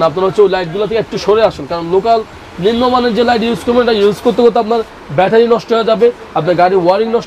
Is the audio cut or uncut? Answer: uncut